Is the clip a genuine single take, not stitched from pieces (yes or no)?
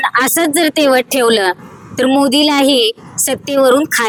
yes